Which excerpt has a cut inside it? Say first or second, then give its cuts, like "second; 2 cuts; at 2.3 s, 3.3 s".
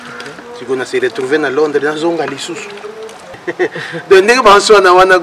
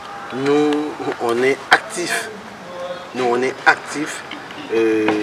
first; 1 cut; at 3.3 s